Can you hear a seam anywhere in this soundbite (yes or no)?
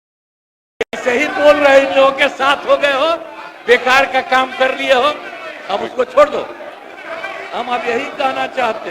no